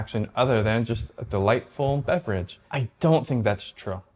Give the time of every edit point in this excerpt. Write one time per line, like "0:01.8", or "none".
none